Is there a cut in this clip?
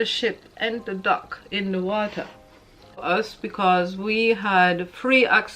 yes; 1 cut; at 3.0 s

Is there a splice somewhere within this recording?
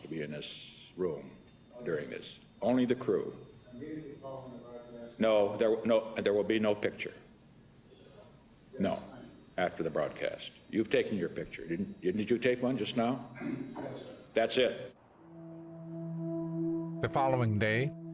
yes; 1 cut; at 7.2 s

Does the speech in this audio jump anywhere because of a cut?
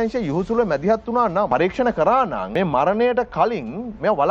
yes; 2 cuts; at 1.5 s, 2.4 s

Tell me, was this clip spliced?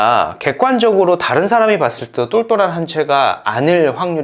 no; 0 cuts

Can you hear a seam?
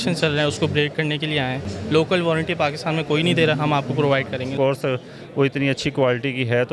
yes; 2 cuts; at 1.7 s, 4.5 s

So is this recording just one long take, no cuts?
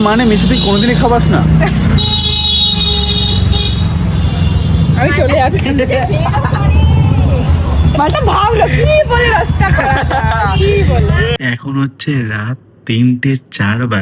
yes; 0 cuts

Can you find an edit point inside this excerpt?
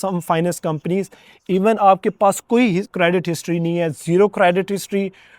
no; 0 cuts

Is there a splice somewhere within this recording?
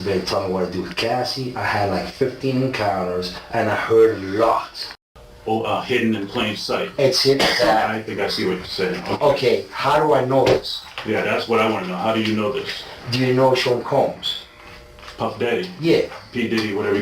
yes; 1 cut; at 5.0 s

